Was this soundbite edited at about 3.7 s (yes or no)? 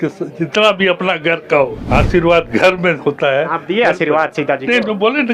no